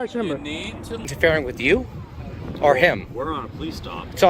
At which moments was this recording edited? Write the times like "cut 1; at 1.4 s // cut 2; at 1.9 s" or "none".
cut 1; at 1.1 s